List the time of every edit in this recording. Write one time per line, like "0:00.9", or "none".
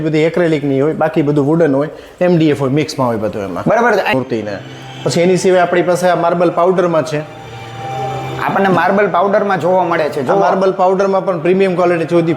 0:04.1